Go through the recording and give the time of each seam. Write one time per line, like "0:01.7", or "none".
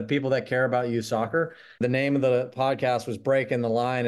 0:01.6